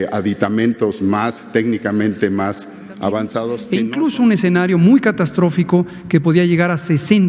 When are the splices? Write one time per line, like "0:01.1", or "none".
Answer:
0:03.6